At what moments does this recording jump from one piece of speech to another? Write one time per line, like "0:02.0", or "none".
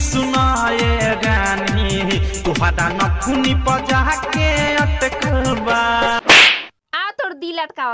none